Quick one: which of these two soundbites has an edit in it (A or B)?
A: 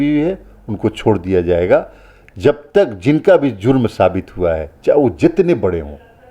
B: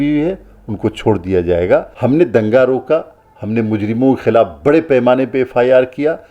B